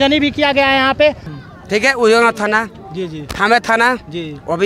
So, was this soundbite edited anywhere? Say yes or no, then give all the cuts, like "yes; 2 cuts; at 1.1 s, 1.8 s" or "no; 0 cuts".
yes; 1 cut; at 1.4 s